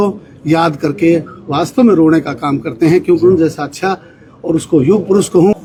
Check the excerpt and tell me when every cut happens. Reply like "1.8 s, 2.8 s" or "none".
none